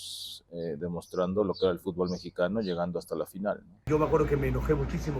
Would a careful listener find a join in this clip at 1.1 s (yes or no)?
no